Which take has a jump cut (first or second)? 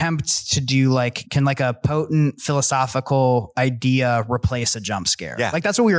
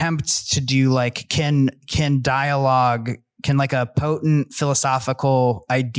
first